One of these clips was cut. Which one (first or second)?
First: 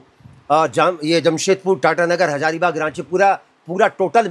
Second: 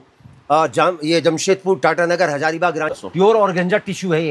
second